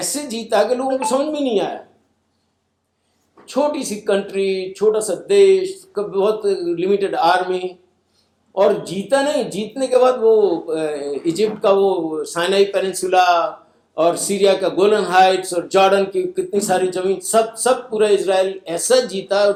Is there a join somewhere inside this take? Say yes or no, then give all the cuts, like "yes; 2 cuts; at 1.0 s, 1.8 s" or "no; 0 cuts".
no; 0 cuts